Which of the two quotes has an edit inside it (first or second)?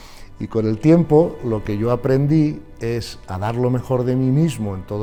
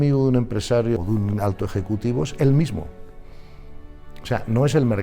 second